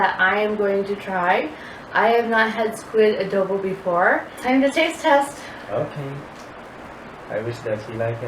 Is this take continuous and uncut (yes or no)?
no